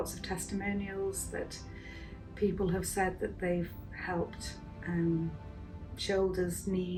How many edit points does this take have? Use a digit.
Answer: 0